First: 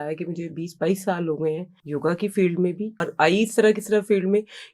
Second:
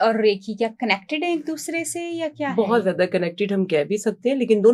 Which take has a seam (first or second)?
first